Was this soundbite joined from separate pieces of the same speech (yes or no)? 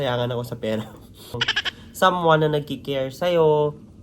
yes